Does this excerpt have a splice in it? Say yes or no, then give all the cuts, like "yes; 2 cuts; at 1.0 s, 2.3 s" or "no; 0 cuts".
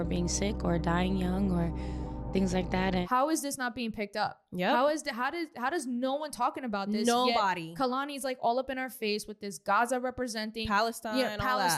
yes; 1 cut; at 3.0 s